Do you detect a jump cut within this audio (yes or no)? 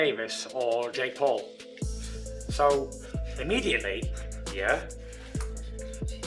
no